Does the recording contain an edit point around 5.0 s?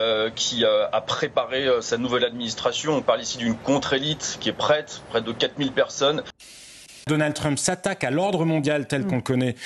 no; 1 cut; at 6.7 s

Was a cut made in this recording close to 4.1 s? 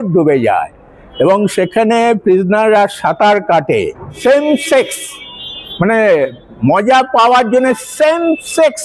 yes; 1 cut; at 4.1 s

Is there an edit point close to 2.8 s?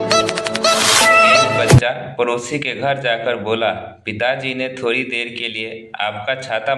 no; 1 cut; at 1.3 s

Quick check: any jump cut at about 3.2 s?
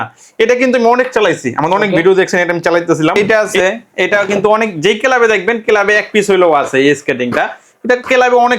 yes; 1 cut; at 3.2 s

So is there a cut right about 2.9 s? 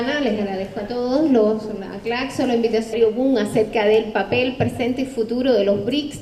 no; 0 cuts

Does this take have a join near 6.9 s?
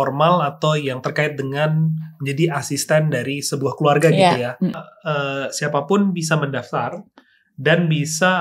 no; 1 cut; at 4.7 s

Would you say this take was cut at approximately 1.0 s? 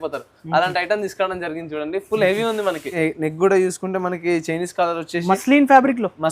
no; 1 cut; at 2.9 s

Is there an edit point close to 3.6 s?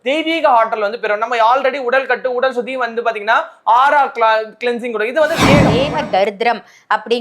no; 1 cut; at 5.7 s

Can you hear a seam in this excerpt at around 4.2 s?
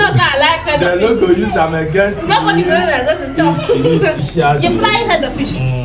yes; 1 cut; at 4.2 s

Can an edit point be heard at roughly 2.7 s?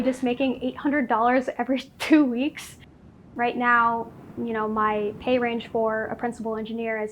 yes; 1 cut; at 2.7 s

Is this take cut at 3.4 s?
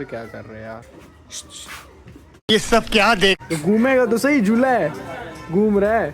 yes; 1 cut; at 3.4 s

